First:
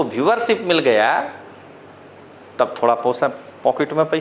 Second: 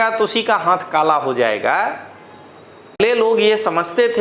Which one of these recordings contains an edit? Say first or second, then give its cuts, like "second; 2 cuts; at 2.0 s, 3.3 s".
second; 1 cut; at 3.0 s